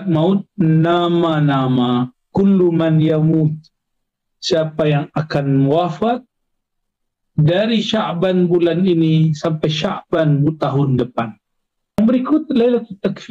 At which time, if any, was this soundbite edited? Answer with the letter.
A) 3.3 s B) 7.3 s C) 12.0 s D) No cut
C